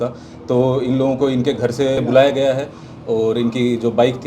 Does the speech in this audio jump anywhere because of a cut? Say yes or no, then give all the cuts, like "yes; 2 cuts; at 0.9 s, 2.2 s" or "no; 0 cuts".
yes; 1 cut; at 2.0 s